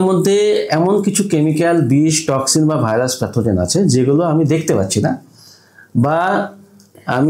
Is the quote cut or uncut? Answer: uncut